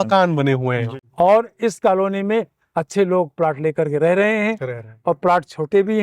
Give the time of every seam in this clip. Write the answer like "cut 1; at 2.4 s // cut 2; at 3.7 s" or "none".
cut 1; at 1.0 s